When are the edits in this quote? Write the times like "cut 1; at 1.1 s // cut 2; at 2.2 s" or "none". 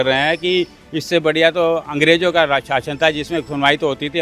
none